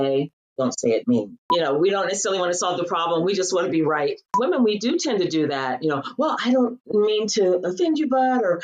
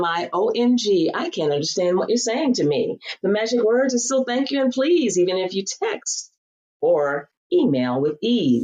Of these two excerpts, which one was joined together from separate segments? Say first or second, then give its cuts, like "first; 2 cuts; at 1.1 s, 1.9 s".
first; 2 cuts; at 1.7 s, 4.3 s